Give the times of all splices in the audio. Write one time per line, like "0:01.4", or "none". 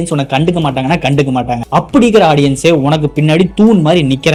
none